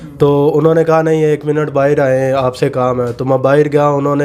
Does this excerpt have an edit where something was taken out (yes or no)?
no